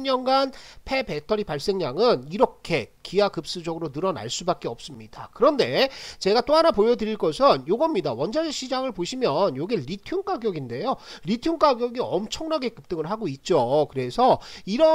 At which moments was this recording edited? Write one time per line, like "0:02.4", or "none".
none